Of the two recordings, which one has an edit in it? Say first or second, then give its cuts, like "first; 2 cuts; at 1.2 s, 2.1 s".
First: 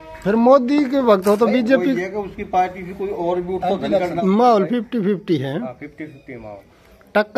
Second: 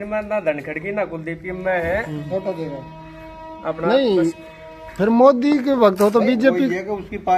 first; 1 cut; at 4.0 s